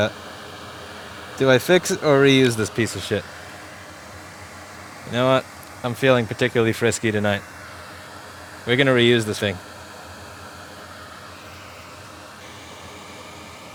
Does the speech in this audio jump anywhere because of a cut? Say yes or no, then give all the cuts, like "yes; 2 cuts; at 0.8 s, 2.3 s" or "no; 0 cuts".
no; 0 cuts